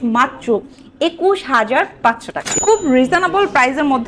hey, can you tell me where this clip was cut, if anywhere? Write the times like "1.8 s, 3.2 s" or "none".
2.4 s